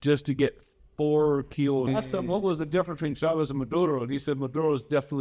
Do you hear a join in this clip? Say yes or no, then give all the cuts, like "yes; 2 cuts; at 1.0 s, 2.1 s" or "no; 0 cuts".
yes; 1 cut; at 1.9 s